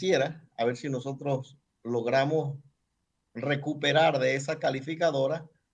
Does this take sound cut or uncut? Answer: uncut